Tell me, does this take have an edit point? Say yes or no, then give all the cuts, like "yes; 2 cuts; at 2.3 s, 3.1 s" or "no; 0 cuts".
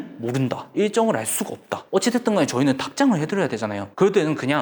yes; 1 cut; at 1.8 s